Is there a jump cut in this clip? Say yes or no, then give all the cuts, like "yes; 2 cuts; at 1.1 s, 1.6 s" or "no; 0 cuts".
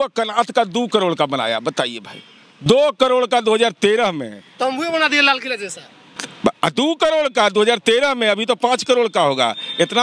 no; 0 cuts